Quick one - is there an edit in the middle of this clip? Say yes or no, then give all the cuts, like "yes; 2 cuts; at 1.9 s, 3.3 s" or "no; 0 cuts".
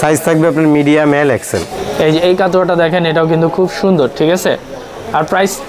yes; 1 cut; at 1.7 s